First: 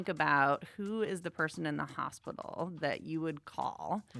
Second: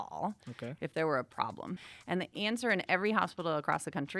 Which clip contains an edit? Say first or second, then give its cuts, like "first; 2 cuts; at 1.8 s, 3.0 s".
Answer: second; 1 cut; at 1.8 s